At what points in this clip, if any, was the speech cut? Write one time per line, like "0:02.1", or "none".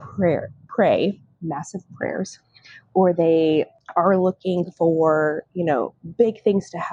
0:03.8